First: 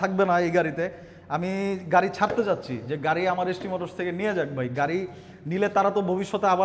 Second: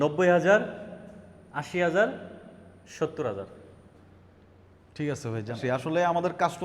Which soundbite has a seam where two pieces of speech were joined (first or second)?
second